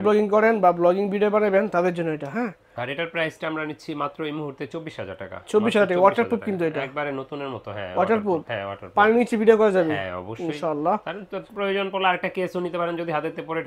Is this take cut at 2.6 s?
no; 0 cuts

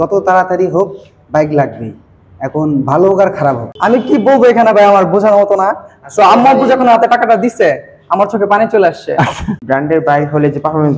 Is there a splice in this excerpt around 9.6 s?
yes; 2 cuts; at 3.7 s, 9.6 s

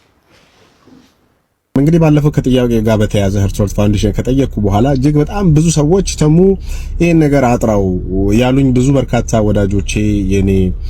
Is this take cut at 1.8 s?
yes; 1 cut; at 1.8 s

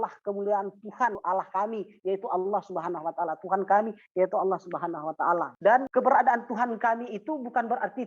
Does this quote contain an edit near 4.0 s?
no; 2 cuts; at 1.2 s, 5.5 s

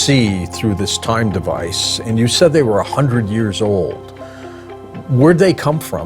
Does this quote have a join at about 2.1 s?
no; 0 cuts

